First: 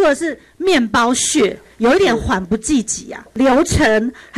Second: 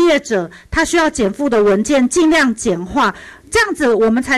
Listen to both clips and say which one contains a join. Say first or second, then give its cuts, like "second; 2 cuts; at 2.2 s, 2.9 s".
first; 1 cut; at 3.2 s